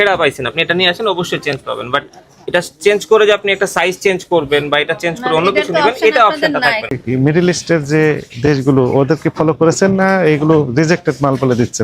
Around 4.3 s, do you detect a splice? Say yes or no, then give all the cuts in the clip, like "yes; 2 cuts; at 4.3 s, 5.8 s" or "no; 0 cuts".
no; 1 cut; at 6.9 s